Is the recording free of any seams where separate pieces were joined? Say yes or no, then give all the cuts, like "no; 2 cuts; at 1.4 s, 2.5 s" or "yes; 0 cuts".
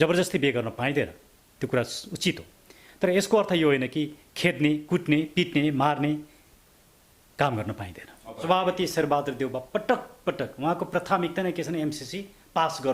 no; 1 cut; at 8.3 s